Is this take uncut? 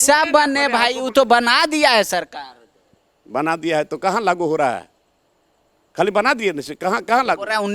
yes; 0 cuts

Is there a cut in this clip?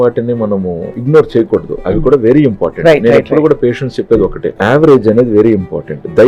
yes; 2 cuts; at 1.0 s, 4.5 s

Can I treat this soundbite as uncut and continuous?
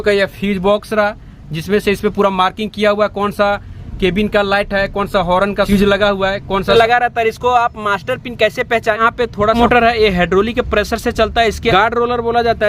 no; 4 cuts; at 5.7 s, 6.7 s, 9.6 s, 11.7 s

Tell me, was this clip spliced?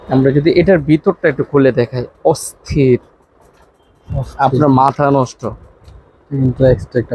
no; 0 cuts

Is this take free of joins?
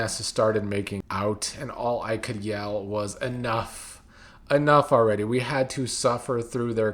no; 1 cut; at 1.0 s

